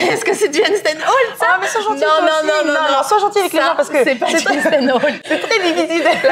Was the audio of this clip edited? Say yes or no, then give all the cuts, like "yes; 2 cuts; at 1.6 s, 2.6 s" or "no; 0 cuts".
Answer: no; 0 cuts